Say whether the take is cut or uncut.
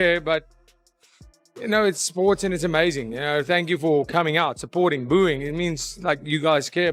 uncut